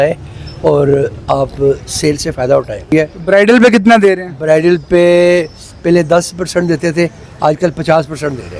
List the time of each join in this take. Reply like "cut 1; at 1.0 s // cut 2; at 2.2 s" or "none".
cut 1; at 2.9 s